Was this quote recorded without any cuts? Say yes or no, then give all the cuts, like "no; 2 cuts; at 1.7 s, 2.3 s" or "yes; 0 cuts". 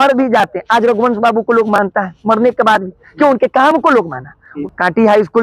no; 1 cut; at 4.5 s